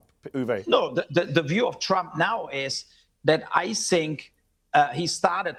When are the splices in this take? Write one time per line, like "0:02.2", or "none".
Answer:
none